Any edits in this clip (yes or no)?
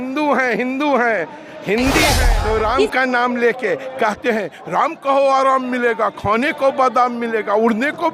yes